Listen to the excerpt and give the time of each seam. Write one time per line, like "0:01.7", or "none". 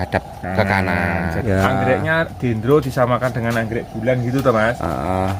0:01.4